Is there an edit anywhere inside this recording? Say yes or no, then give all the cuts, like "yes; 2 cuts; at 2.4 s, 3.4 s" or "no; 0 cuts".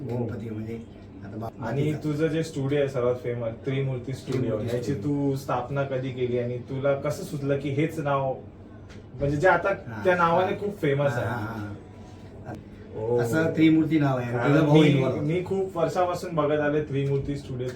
yes; 2 cuts; at 1.5 s, 12.6 s